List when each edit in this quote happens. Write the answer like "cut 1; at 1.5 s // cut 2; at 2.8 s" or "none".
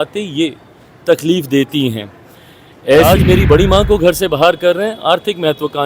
cut 1; at 3.0 s